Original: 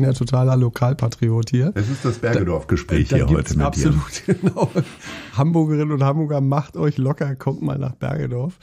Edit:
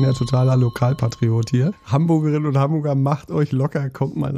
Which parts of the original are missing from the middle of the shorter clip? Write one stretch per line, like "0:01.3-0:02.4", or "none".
0:01.8-0:05.2